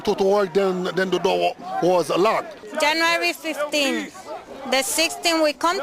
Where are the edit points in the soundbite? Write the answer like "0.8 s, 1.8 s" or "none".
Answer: 2.6 s